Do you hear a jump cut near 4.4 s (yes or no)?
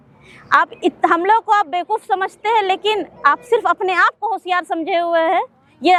no